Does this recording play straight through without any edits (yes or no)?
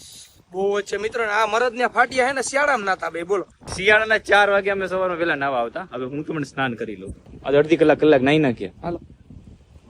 yes